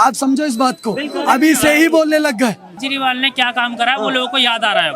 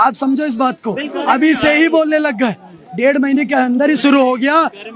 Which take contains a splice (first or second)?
first